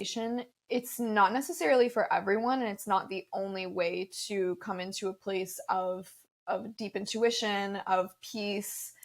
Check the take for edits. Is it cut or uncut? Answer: uncut